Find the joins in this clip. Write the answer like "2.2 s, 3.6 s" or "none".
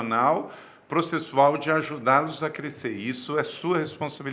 none